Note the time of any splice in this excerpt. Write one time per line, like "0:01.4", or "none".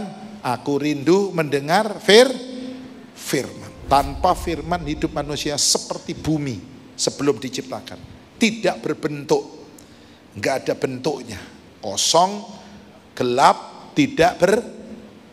0:03.7